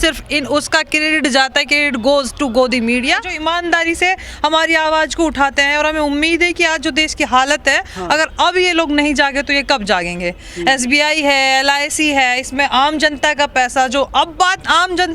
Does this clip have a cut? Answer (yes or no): yes